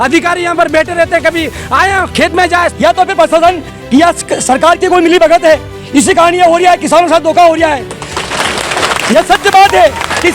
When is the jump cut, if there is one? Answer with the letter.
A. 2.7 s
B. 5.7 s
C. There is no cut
A